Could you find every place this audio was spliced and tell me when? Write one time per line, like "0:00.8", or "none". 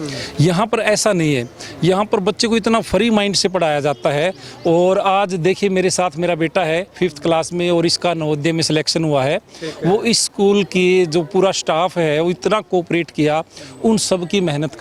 none